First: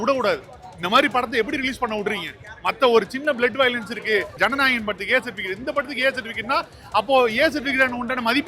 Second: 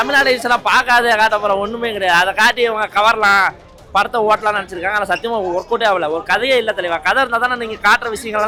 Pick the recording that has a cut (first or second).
first